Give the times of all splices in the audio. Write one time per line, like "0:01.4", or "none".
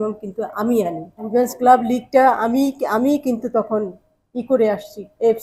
0:01.2